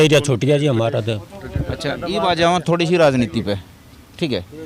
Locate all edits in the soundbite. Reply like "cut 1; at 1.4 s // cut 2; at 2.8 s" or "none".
none

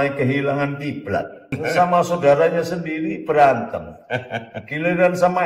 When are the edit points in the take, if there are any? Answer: cut 1; at 1.5 s

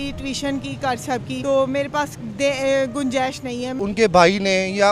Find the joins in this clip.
cut 1; at 1.4 s // cut 2; at 3.8 s

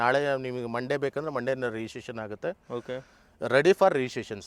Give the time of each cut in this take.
none

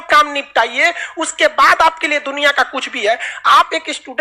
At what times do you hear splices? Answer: none

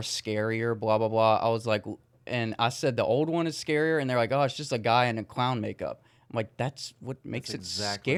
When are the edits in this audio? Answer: none

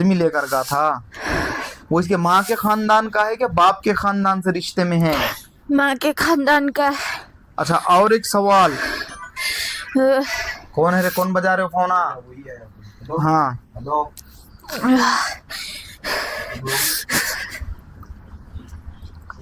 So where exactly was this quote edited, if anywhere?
none

